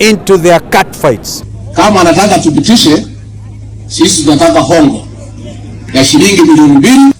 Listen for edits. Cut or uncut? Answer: cut